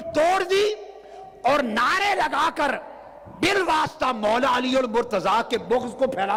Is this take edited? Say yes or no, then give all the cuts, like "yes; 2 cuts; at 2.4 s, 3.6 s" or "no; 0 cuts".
no; 0 cuts